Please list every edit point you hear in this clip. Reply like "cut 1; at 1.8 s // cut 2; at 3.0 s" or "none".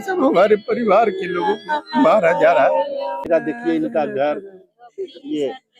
cut 1; at 3.3 s